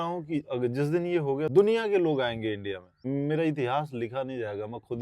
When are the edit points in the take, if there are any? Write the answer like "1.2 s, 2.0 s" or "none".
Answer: 1.5 s, 3.0 s